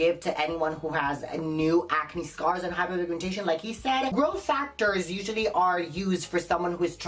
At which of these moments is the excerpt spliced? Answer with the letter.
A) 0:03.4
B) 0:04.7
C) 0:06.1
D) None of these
D